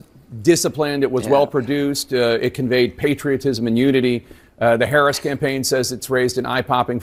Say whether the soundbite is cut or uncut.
uncut